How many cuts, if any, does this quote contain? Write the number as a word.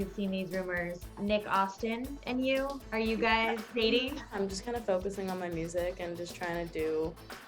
five